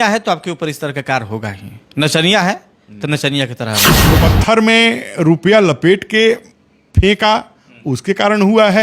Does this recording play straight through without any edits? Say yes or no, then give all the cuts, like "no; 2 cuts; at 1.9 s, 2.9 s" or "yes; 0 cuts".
no; 1 cut; at 4.1 s